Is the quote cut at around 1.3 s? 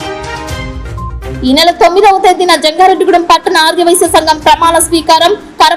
yes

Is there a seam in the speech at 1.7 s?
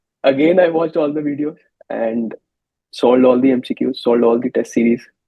yes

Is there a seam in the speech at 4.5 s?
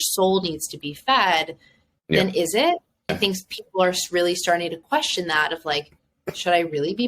no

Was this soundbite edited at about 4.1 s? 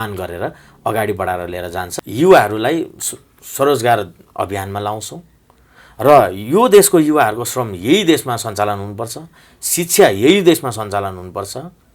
no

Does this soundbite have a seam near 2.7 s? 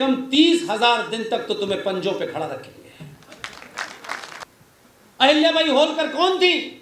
no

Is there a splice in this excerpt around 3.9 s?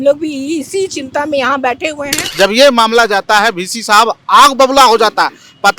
no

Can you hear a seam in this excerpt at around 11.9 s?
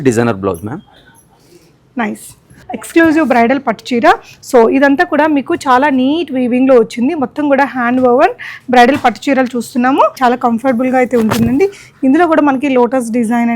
no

